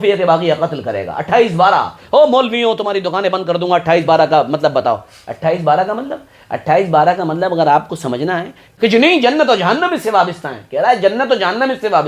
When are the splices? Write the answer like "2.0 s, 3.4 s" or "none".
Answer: 8.7 s